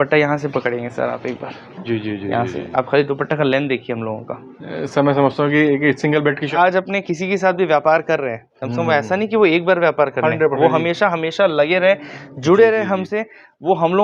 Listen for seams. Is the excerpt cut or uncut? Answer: cut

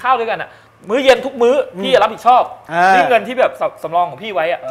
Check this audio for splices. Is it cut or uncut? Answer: cut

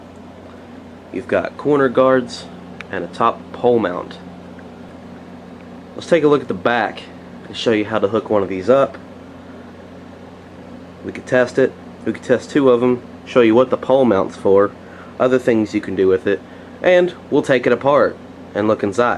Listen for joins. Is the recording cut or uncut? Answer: uncut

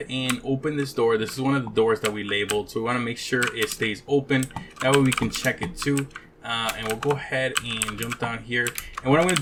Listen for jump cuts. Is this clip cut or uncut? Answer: uncut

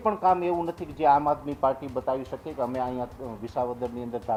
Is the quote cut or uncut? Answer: uncut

